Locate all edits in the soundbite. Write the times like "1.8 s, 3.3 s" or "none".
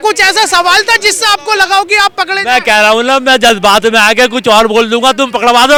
none